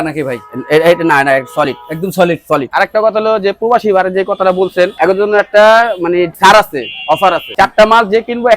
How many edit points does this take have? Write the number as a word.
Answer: three